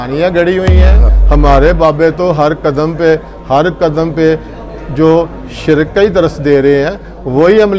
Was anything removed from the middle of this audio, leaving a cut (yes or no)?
yes